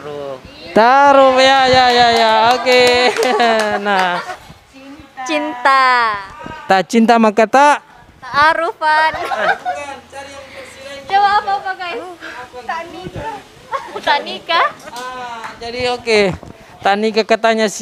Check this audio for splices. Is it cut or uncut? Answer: uncut